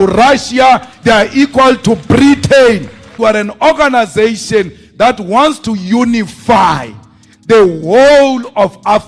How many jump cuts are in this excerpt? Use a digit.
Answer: 1